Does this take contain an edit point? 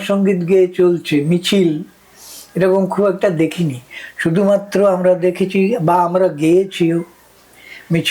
no; 0 cuts

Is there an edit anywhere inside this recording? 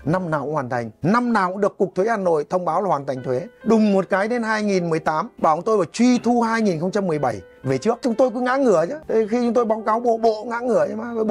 yes; 5 cuts; at 0.9 s, 3.5 s, 5.3 s, 8.0 s, 9.0 s

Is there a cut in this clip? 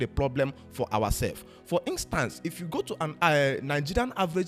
no; 0 cuts

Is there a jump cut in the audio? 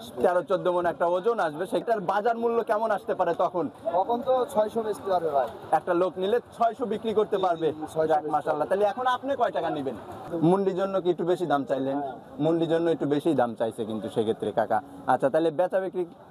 yes; 2 cuts; at 1.8 s, 10.2 s

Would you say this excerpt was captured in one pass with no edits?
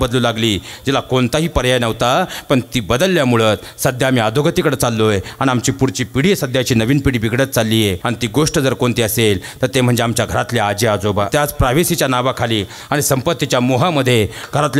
no; 2 cuts; at 8.0 s, 11.3 s

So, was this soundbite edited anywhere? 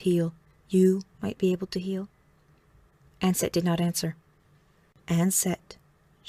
yes; 1 cut; at 5.0 s

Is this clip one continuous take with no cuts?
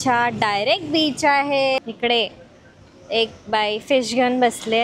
no; 1 cut; at 1.8 s

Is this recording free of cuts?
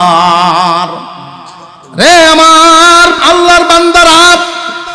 no; 1 cut; at 3.2 s

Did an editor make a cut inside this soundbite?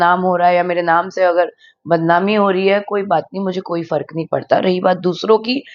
no; 0 cuts

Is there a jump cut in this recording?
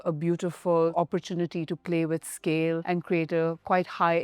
yes; 2 cuts; at 0.9 s, 2.8 s

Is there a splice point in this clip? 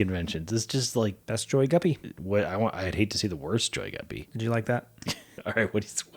yes; 4 cuts; at 1.2 s, 2.1 s, 4.2 s, 5.3 s

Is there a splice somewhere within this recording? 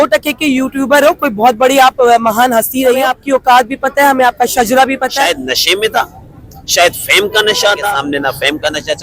yes; 3 cuts; at 3.1 s, 5.3 s, 7.9 s

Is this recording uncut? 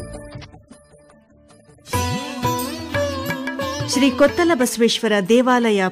no; 1 cut; at 1.9 s

